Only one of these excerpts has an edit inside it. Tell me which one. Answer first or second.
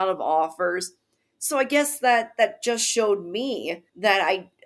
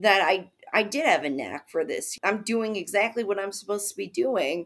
second